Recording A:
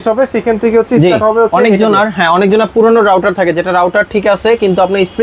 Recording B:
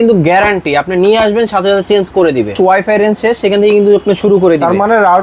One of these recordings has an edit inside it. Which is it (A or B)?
B